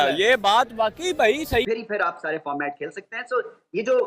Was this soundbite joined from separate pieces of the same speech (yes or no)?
yes